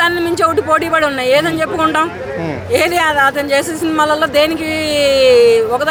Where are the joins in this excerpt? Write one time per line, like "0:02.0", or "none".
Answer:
none